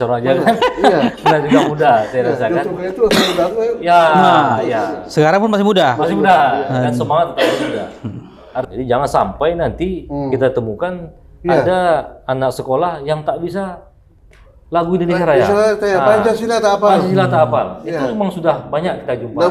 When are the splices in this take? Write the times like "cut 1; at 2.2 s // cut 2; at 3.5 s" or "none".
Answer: cut 1; at 8.7 s